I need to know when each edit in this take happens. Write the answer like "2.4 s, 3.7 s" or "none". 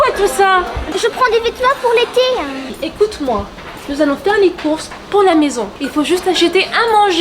2.7 s, 5.7 s